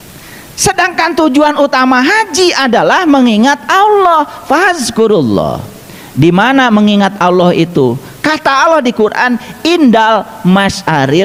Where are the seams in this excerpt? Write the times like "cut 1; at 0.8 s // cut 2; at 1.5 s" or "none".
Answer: none